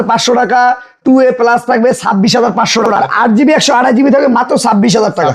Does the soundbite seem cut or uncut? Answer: cut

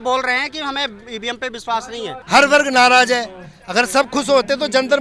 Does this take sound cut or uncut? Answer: cut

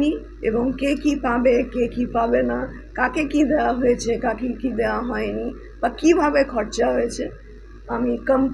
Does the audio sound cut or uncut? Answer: uncut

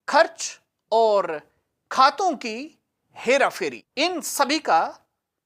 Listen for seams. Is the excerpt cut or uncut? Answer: cut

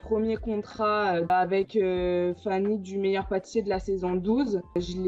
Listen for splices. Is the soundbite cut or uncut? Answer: uncut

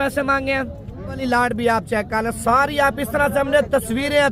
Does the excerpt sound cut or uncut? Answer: cut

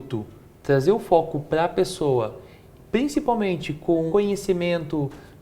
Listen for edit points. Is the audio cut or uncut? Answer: cut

